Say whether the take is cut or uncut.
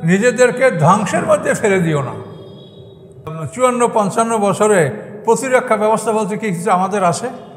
cut